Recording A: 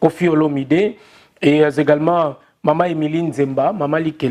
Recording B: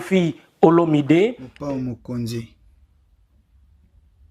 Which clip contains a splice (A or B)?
B